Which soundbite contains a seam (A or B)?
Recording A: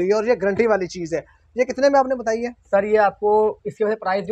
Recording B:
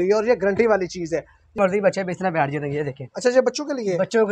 B